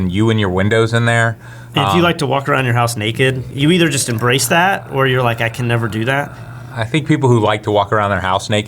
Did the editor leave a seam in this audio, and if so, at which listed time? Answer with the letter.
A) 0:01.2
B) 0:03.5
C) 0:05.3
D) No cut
B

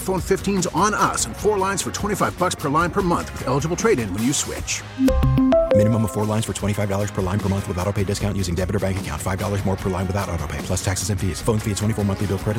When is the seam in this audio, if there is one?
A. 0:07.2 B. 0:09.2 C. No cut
C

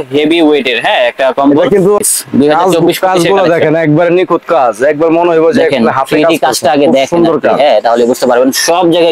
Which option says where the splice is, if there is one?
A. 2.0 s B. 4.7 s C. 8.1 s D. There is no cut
A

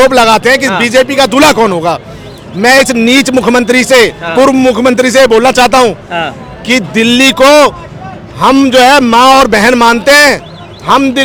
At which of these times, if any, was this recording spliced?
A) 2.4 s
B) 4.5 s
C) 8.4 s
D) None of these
D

